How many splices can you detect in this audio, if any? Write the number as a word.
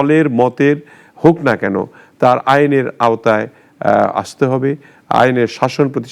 zero